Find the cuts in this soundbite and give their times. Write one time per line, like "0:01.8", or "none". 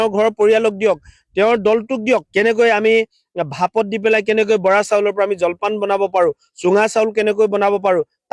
0:02.3